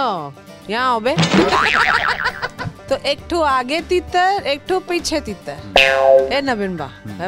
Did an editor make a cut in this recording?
yes; 1 cut; at 2.7 s

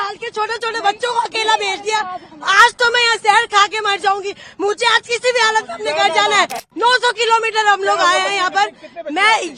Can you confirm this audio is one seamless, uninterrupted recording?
no; 1 cut; at 6.7 s

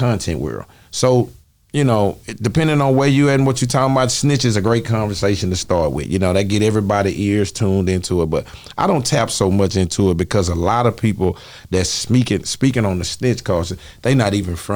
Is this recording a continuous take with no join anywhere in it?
yes; 0 cuts

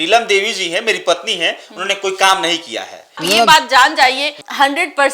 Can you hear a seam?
yes; 1 cut; at 3.3 s

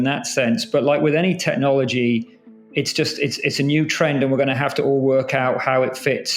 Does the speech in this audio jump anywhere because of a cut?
no; 0 cuts

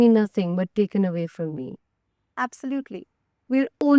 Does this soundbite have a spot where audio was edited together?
yes; 1 cut; at 2.3 s

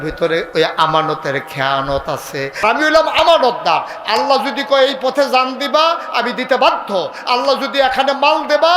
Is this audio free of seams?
no; 1 cut; at 2.6 s

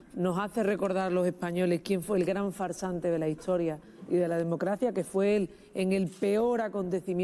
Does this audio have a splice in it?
no; 0 cuts

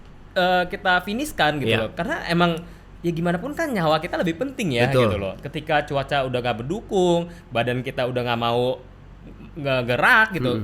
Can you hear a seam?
no; 0 cuts

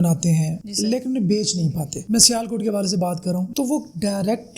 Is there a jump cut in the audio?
yes; 2 cuts; at 2.0 s, 3.5 s

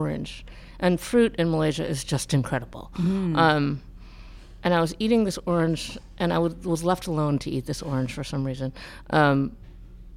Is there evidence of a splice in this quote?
no; 0 cuts

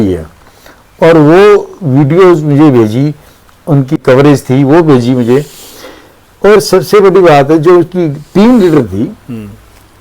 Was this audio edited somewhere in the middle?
yes; 1 cut; at 4.0 s

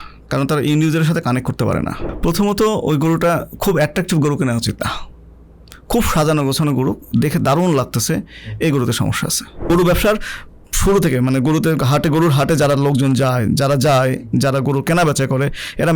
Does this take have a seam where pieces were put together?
yes; 2 cuts; at 2.0 s, 9.7 s

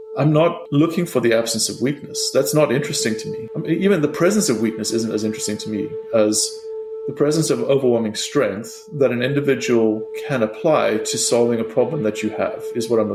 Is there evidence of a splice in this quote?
no; 0 cuts

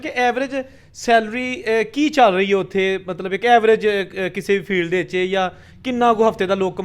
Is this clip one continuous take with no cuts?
yes; 0 cuts

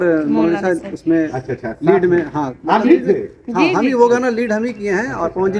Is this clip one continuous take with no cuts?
yes; 0 cuts

